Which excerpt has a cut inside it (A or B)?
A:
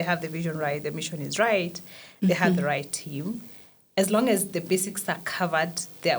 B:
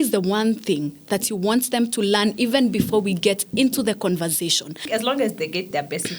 B